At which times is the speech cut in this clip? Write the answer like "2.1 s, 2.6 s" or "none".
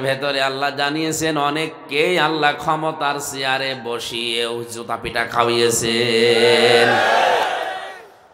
7.4 s